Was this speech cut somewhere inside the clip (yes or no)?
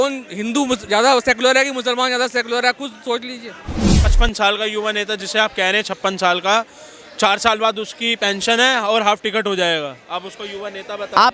yes